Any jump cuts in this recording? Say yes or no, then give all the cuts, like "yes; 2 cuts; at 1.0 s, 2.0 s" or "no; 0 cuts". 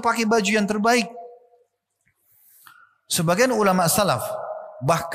no; 0 cuts